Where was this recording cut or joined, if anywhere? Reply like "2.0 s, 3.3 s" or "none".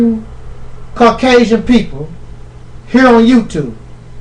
1.2 s